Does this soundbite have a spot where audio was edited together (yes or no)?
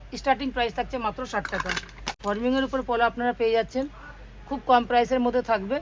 yes